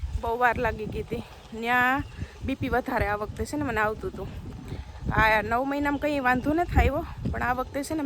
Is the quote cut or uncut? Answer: uncut